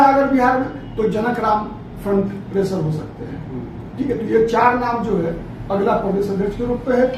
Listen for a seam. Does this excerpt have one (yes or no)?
no